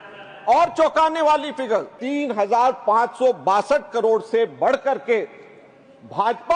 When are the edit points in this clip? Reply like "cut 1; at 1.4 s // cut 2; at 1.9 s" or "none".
cut 1; at 2.0 s